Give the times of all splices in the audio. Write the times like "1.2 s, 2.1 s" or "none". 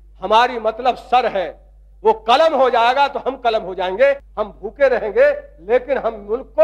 4.3 s